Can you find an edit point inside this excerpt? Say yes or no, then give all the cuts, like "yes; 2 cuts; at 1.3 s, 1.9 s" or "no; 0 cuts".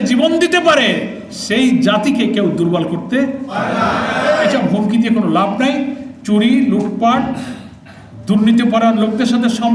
no; 0 cuts